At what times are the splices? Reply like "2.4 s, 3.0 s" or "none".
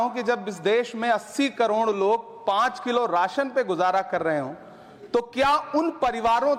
none